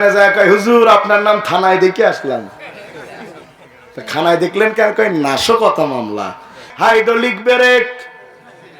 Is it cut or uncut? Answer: cut